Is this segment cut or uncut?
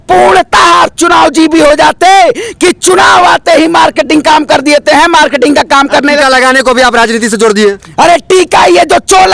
uncut